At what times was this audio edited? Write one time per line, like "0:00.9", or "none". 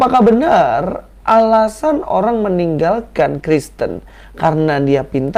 none

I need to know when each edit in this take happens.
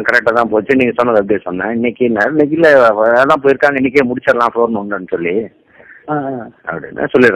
none

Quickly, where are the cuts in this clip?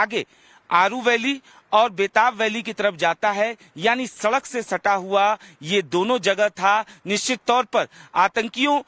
0:05.5

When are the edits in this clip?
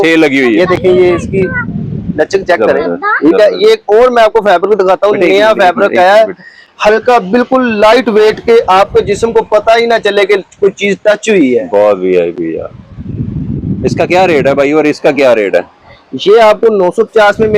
none

